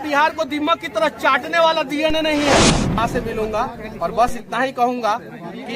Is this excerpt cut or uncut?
cut